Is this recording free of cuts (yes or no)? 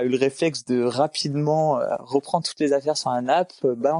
yes